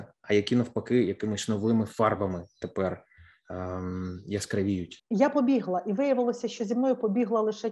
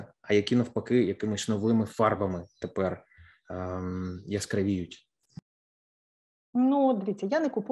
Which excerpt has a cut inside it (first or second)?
first